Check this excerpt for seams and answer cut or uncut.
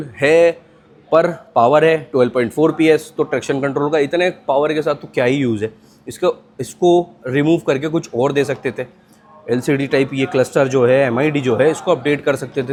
uncut